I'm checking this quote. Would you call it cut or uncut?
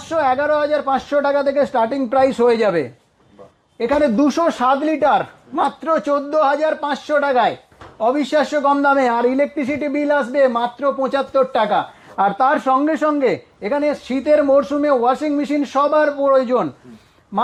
uncut